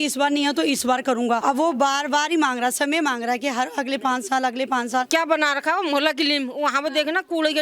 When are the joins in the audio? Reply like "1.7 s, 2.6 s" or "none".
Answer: 1.4 s, 5.1 s